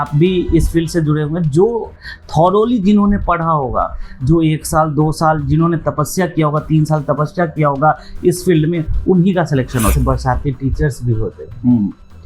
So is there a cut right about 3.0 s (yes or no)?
no